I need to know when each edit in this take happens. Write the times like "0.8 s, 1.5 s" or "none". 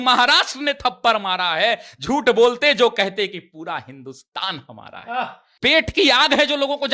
5.4 s